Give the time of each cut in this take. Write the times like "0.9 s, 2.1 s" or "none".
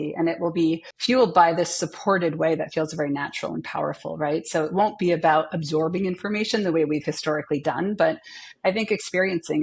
0.9 s